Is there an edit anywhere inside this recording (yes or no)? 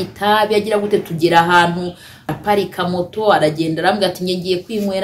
yes